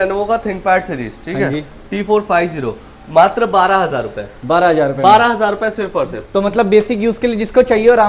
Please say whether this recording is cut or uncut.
uncut